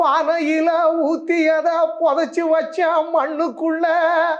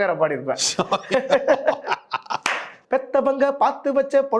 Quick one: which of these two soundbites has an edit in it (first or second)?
second